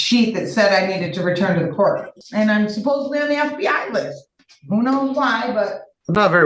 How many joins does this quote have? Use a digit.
2